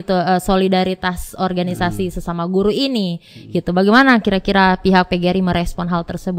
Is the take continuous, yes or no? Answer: yes